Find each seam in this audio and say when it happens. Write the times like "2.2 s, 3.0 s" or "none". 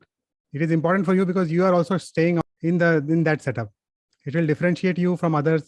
2.4 s